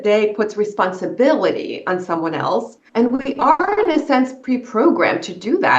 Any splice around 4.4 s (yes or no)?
no